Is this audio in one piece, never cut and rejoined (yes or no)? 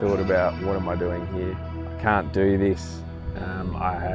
no